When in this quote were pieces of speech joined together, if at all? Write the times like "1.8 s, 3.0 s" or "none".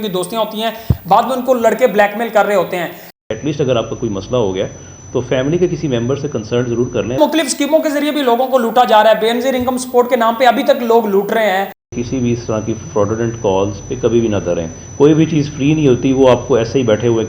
3.1 s, 7.2 s, 11.8 s